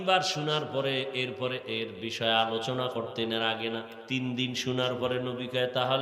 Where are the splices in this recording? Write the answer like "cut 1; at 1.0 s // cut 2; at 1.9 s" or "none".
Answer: cut 1; at 4.0 s